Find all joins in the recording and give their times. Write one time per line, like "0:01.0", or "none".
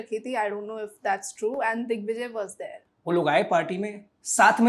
0:02.8